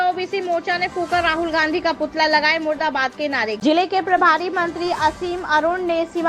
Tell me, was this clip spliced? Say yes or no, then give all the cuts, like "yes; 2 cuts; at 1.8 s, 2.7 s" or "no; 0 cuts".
yes; 1 cut; at 3.6 s